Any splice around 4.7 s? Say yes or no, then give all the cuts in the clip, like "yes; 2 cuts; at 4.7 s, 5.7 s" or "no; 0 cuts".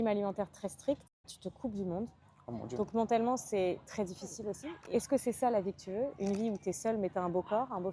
yes; 2 cuts; at 1.3 s, 4.7 s